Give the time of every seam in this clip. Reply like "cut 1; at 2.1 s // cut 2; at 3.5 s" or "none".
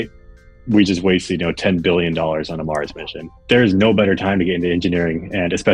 cut 1; at 3.3 s